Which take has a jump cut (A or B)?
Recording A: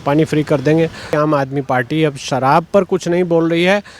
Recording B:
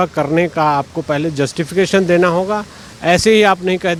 A